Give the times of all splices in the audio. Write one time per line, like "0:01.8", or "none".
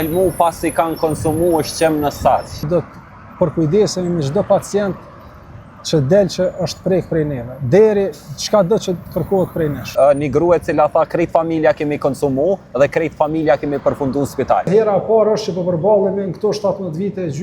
0:02.7
0:09.9
0:14.7